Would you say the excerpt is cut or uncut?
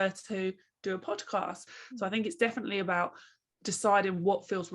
cut